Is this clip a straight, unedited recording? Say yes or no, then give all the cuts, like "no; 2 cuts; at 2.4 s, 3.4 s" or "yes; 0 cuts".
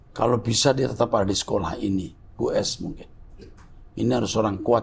yes; 0 cuts